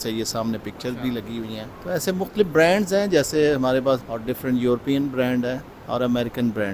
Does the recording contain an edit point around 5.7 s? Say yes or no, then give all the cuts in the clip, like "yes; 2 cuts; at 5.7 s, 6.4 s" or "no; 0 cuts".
yes; 3 cuts; at 1.7 s, 4.0 s, 5.7 s